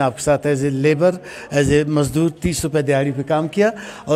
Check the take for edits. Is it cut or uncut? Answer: uncut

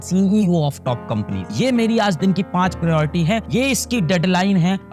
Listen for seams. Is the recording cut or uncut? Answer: uncut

